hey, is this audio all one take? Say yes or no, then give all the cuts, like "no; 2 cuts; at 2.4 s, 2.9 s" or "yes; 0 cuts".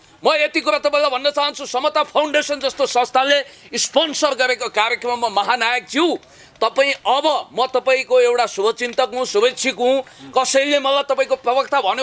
yes; 0 cuts